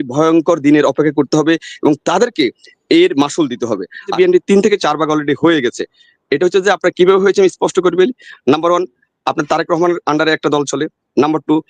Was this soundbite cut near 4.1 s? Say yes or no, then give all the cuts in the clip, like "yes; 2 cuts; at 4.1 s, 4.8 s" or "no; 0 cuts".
yes; 1 cut; at 4.1 s